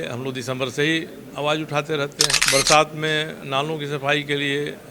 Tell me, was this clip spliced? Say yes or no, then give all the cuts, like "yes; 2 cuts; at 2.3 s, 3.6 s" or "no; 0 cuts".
yes; 1 cut; at 2.4 s